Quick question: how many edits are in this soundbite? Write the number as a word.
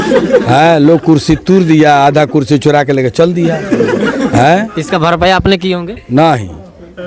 zero